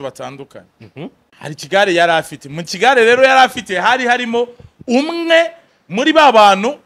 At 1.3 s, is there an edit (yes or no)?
yes